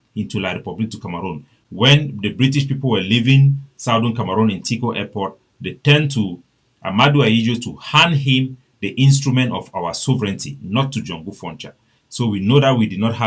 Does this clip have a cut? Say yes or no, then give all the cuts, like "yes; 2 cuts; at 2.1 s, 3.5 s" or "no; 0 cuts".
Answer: yes; 1 cut; at 1.5 s